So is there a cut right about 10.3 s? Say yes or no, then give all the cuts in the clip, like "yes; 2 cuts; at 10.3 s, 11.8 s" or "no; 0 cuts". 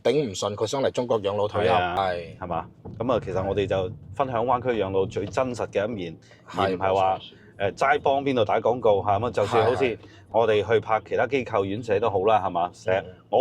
no; 1 cut; at 2.0 s